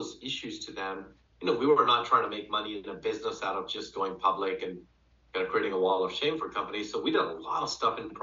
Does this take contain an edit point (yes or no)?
no